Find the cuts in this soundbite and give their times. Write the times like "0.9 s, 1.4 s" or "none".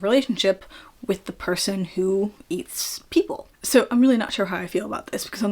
none